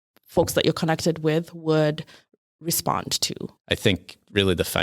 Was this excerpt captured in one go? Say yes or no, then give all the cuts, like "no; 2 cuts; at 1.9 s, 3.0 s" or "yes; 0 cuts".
no; 1 cut; at 3.5 s